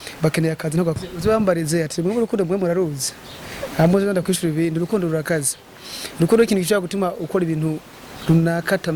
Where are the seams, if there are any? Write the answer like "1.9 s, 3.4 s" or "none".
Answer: 1.0 s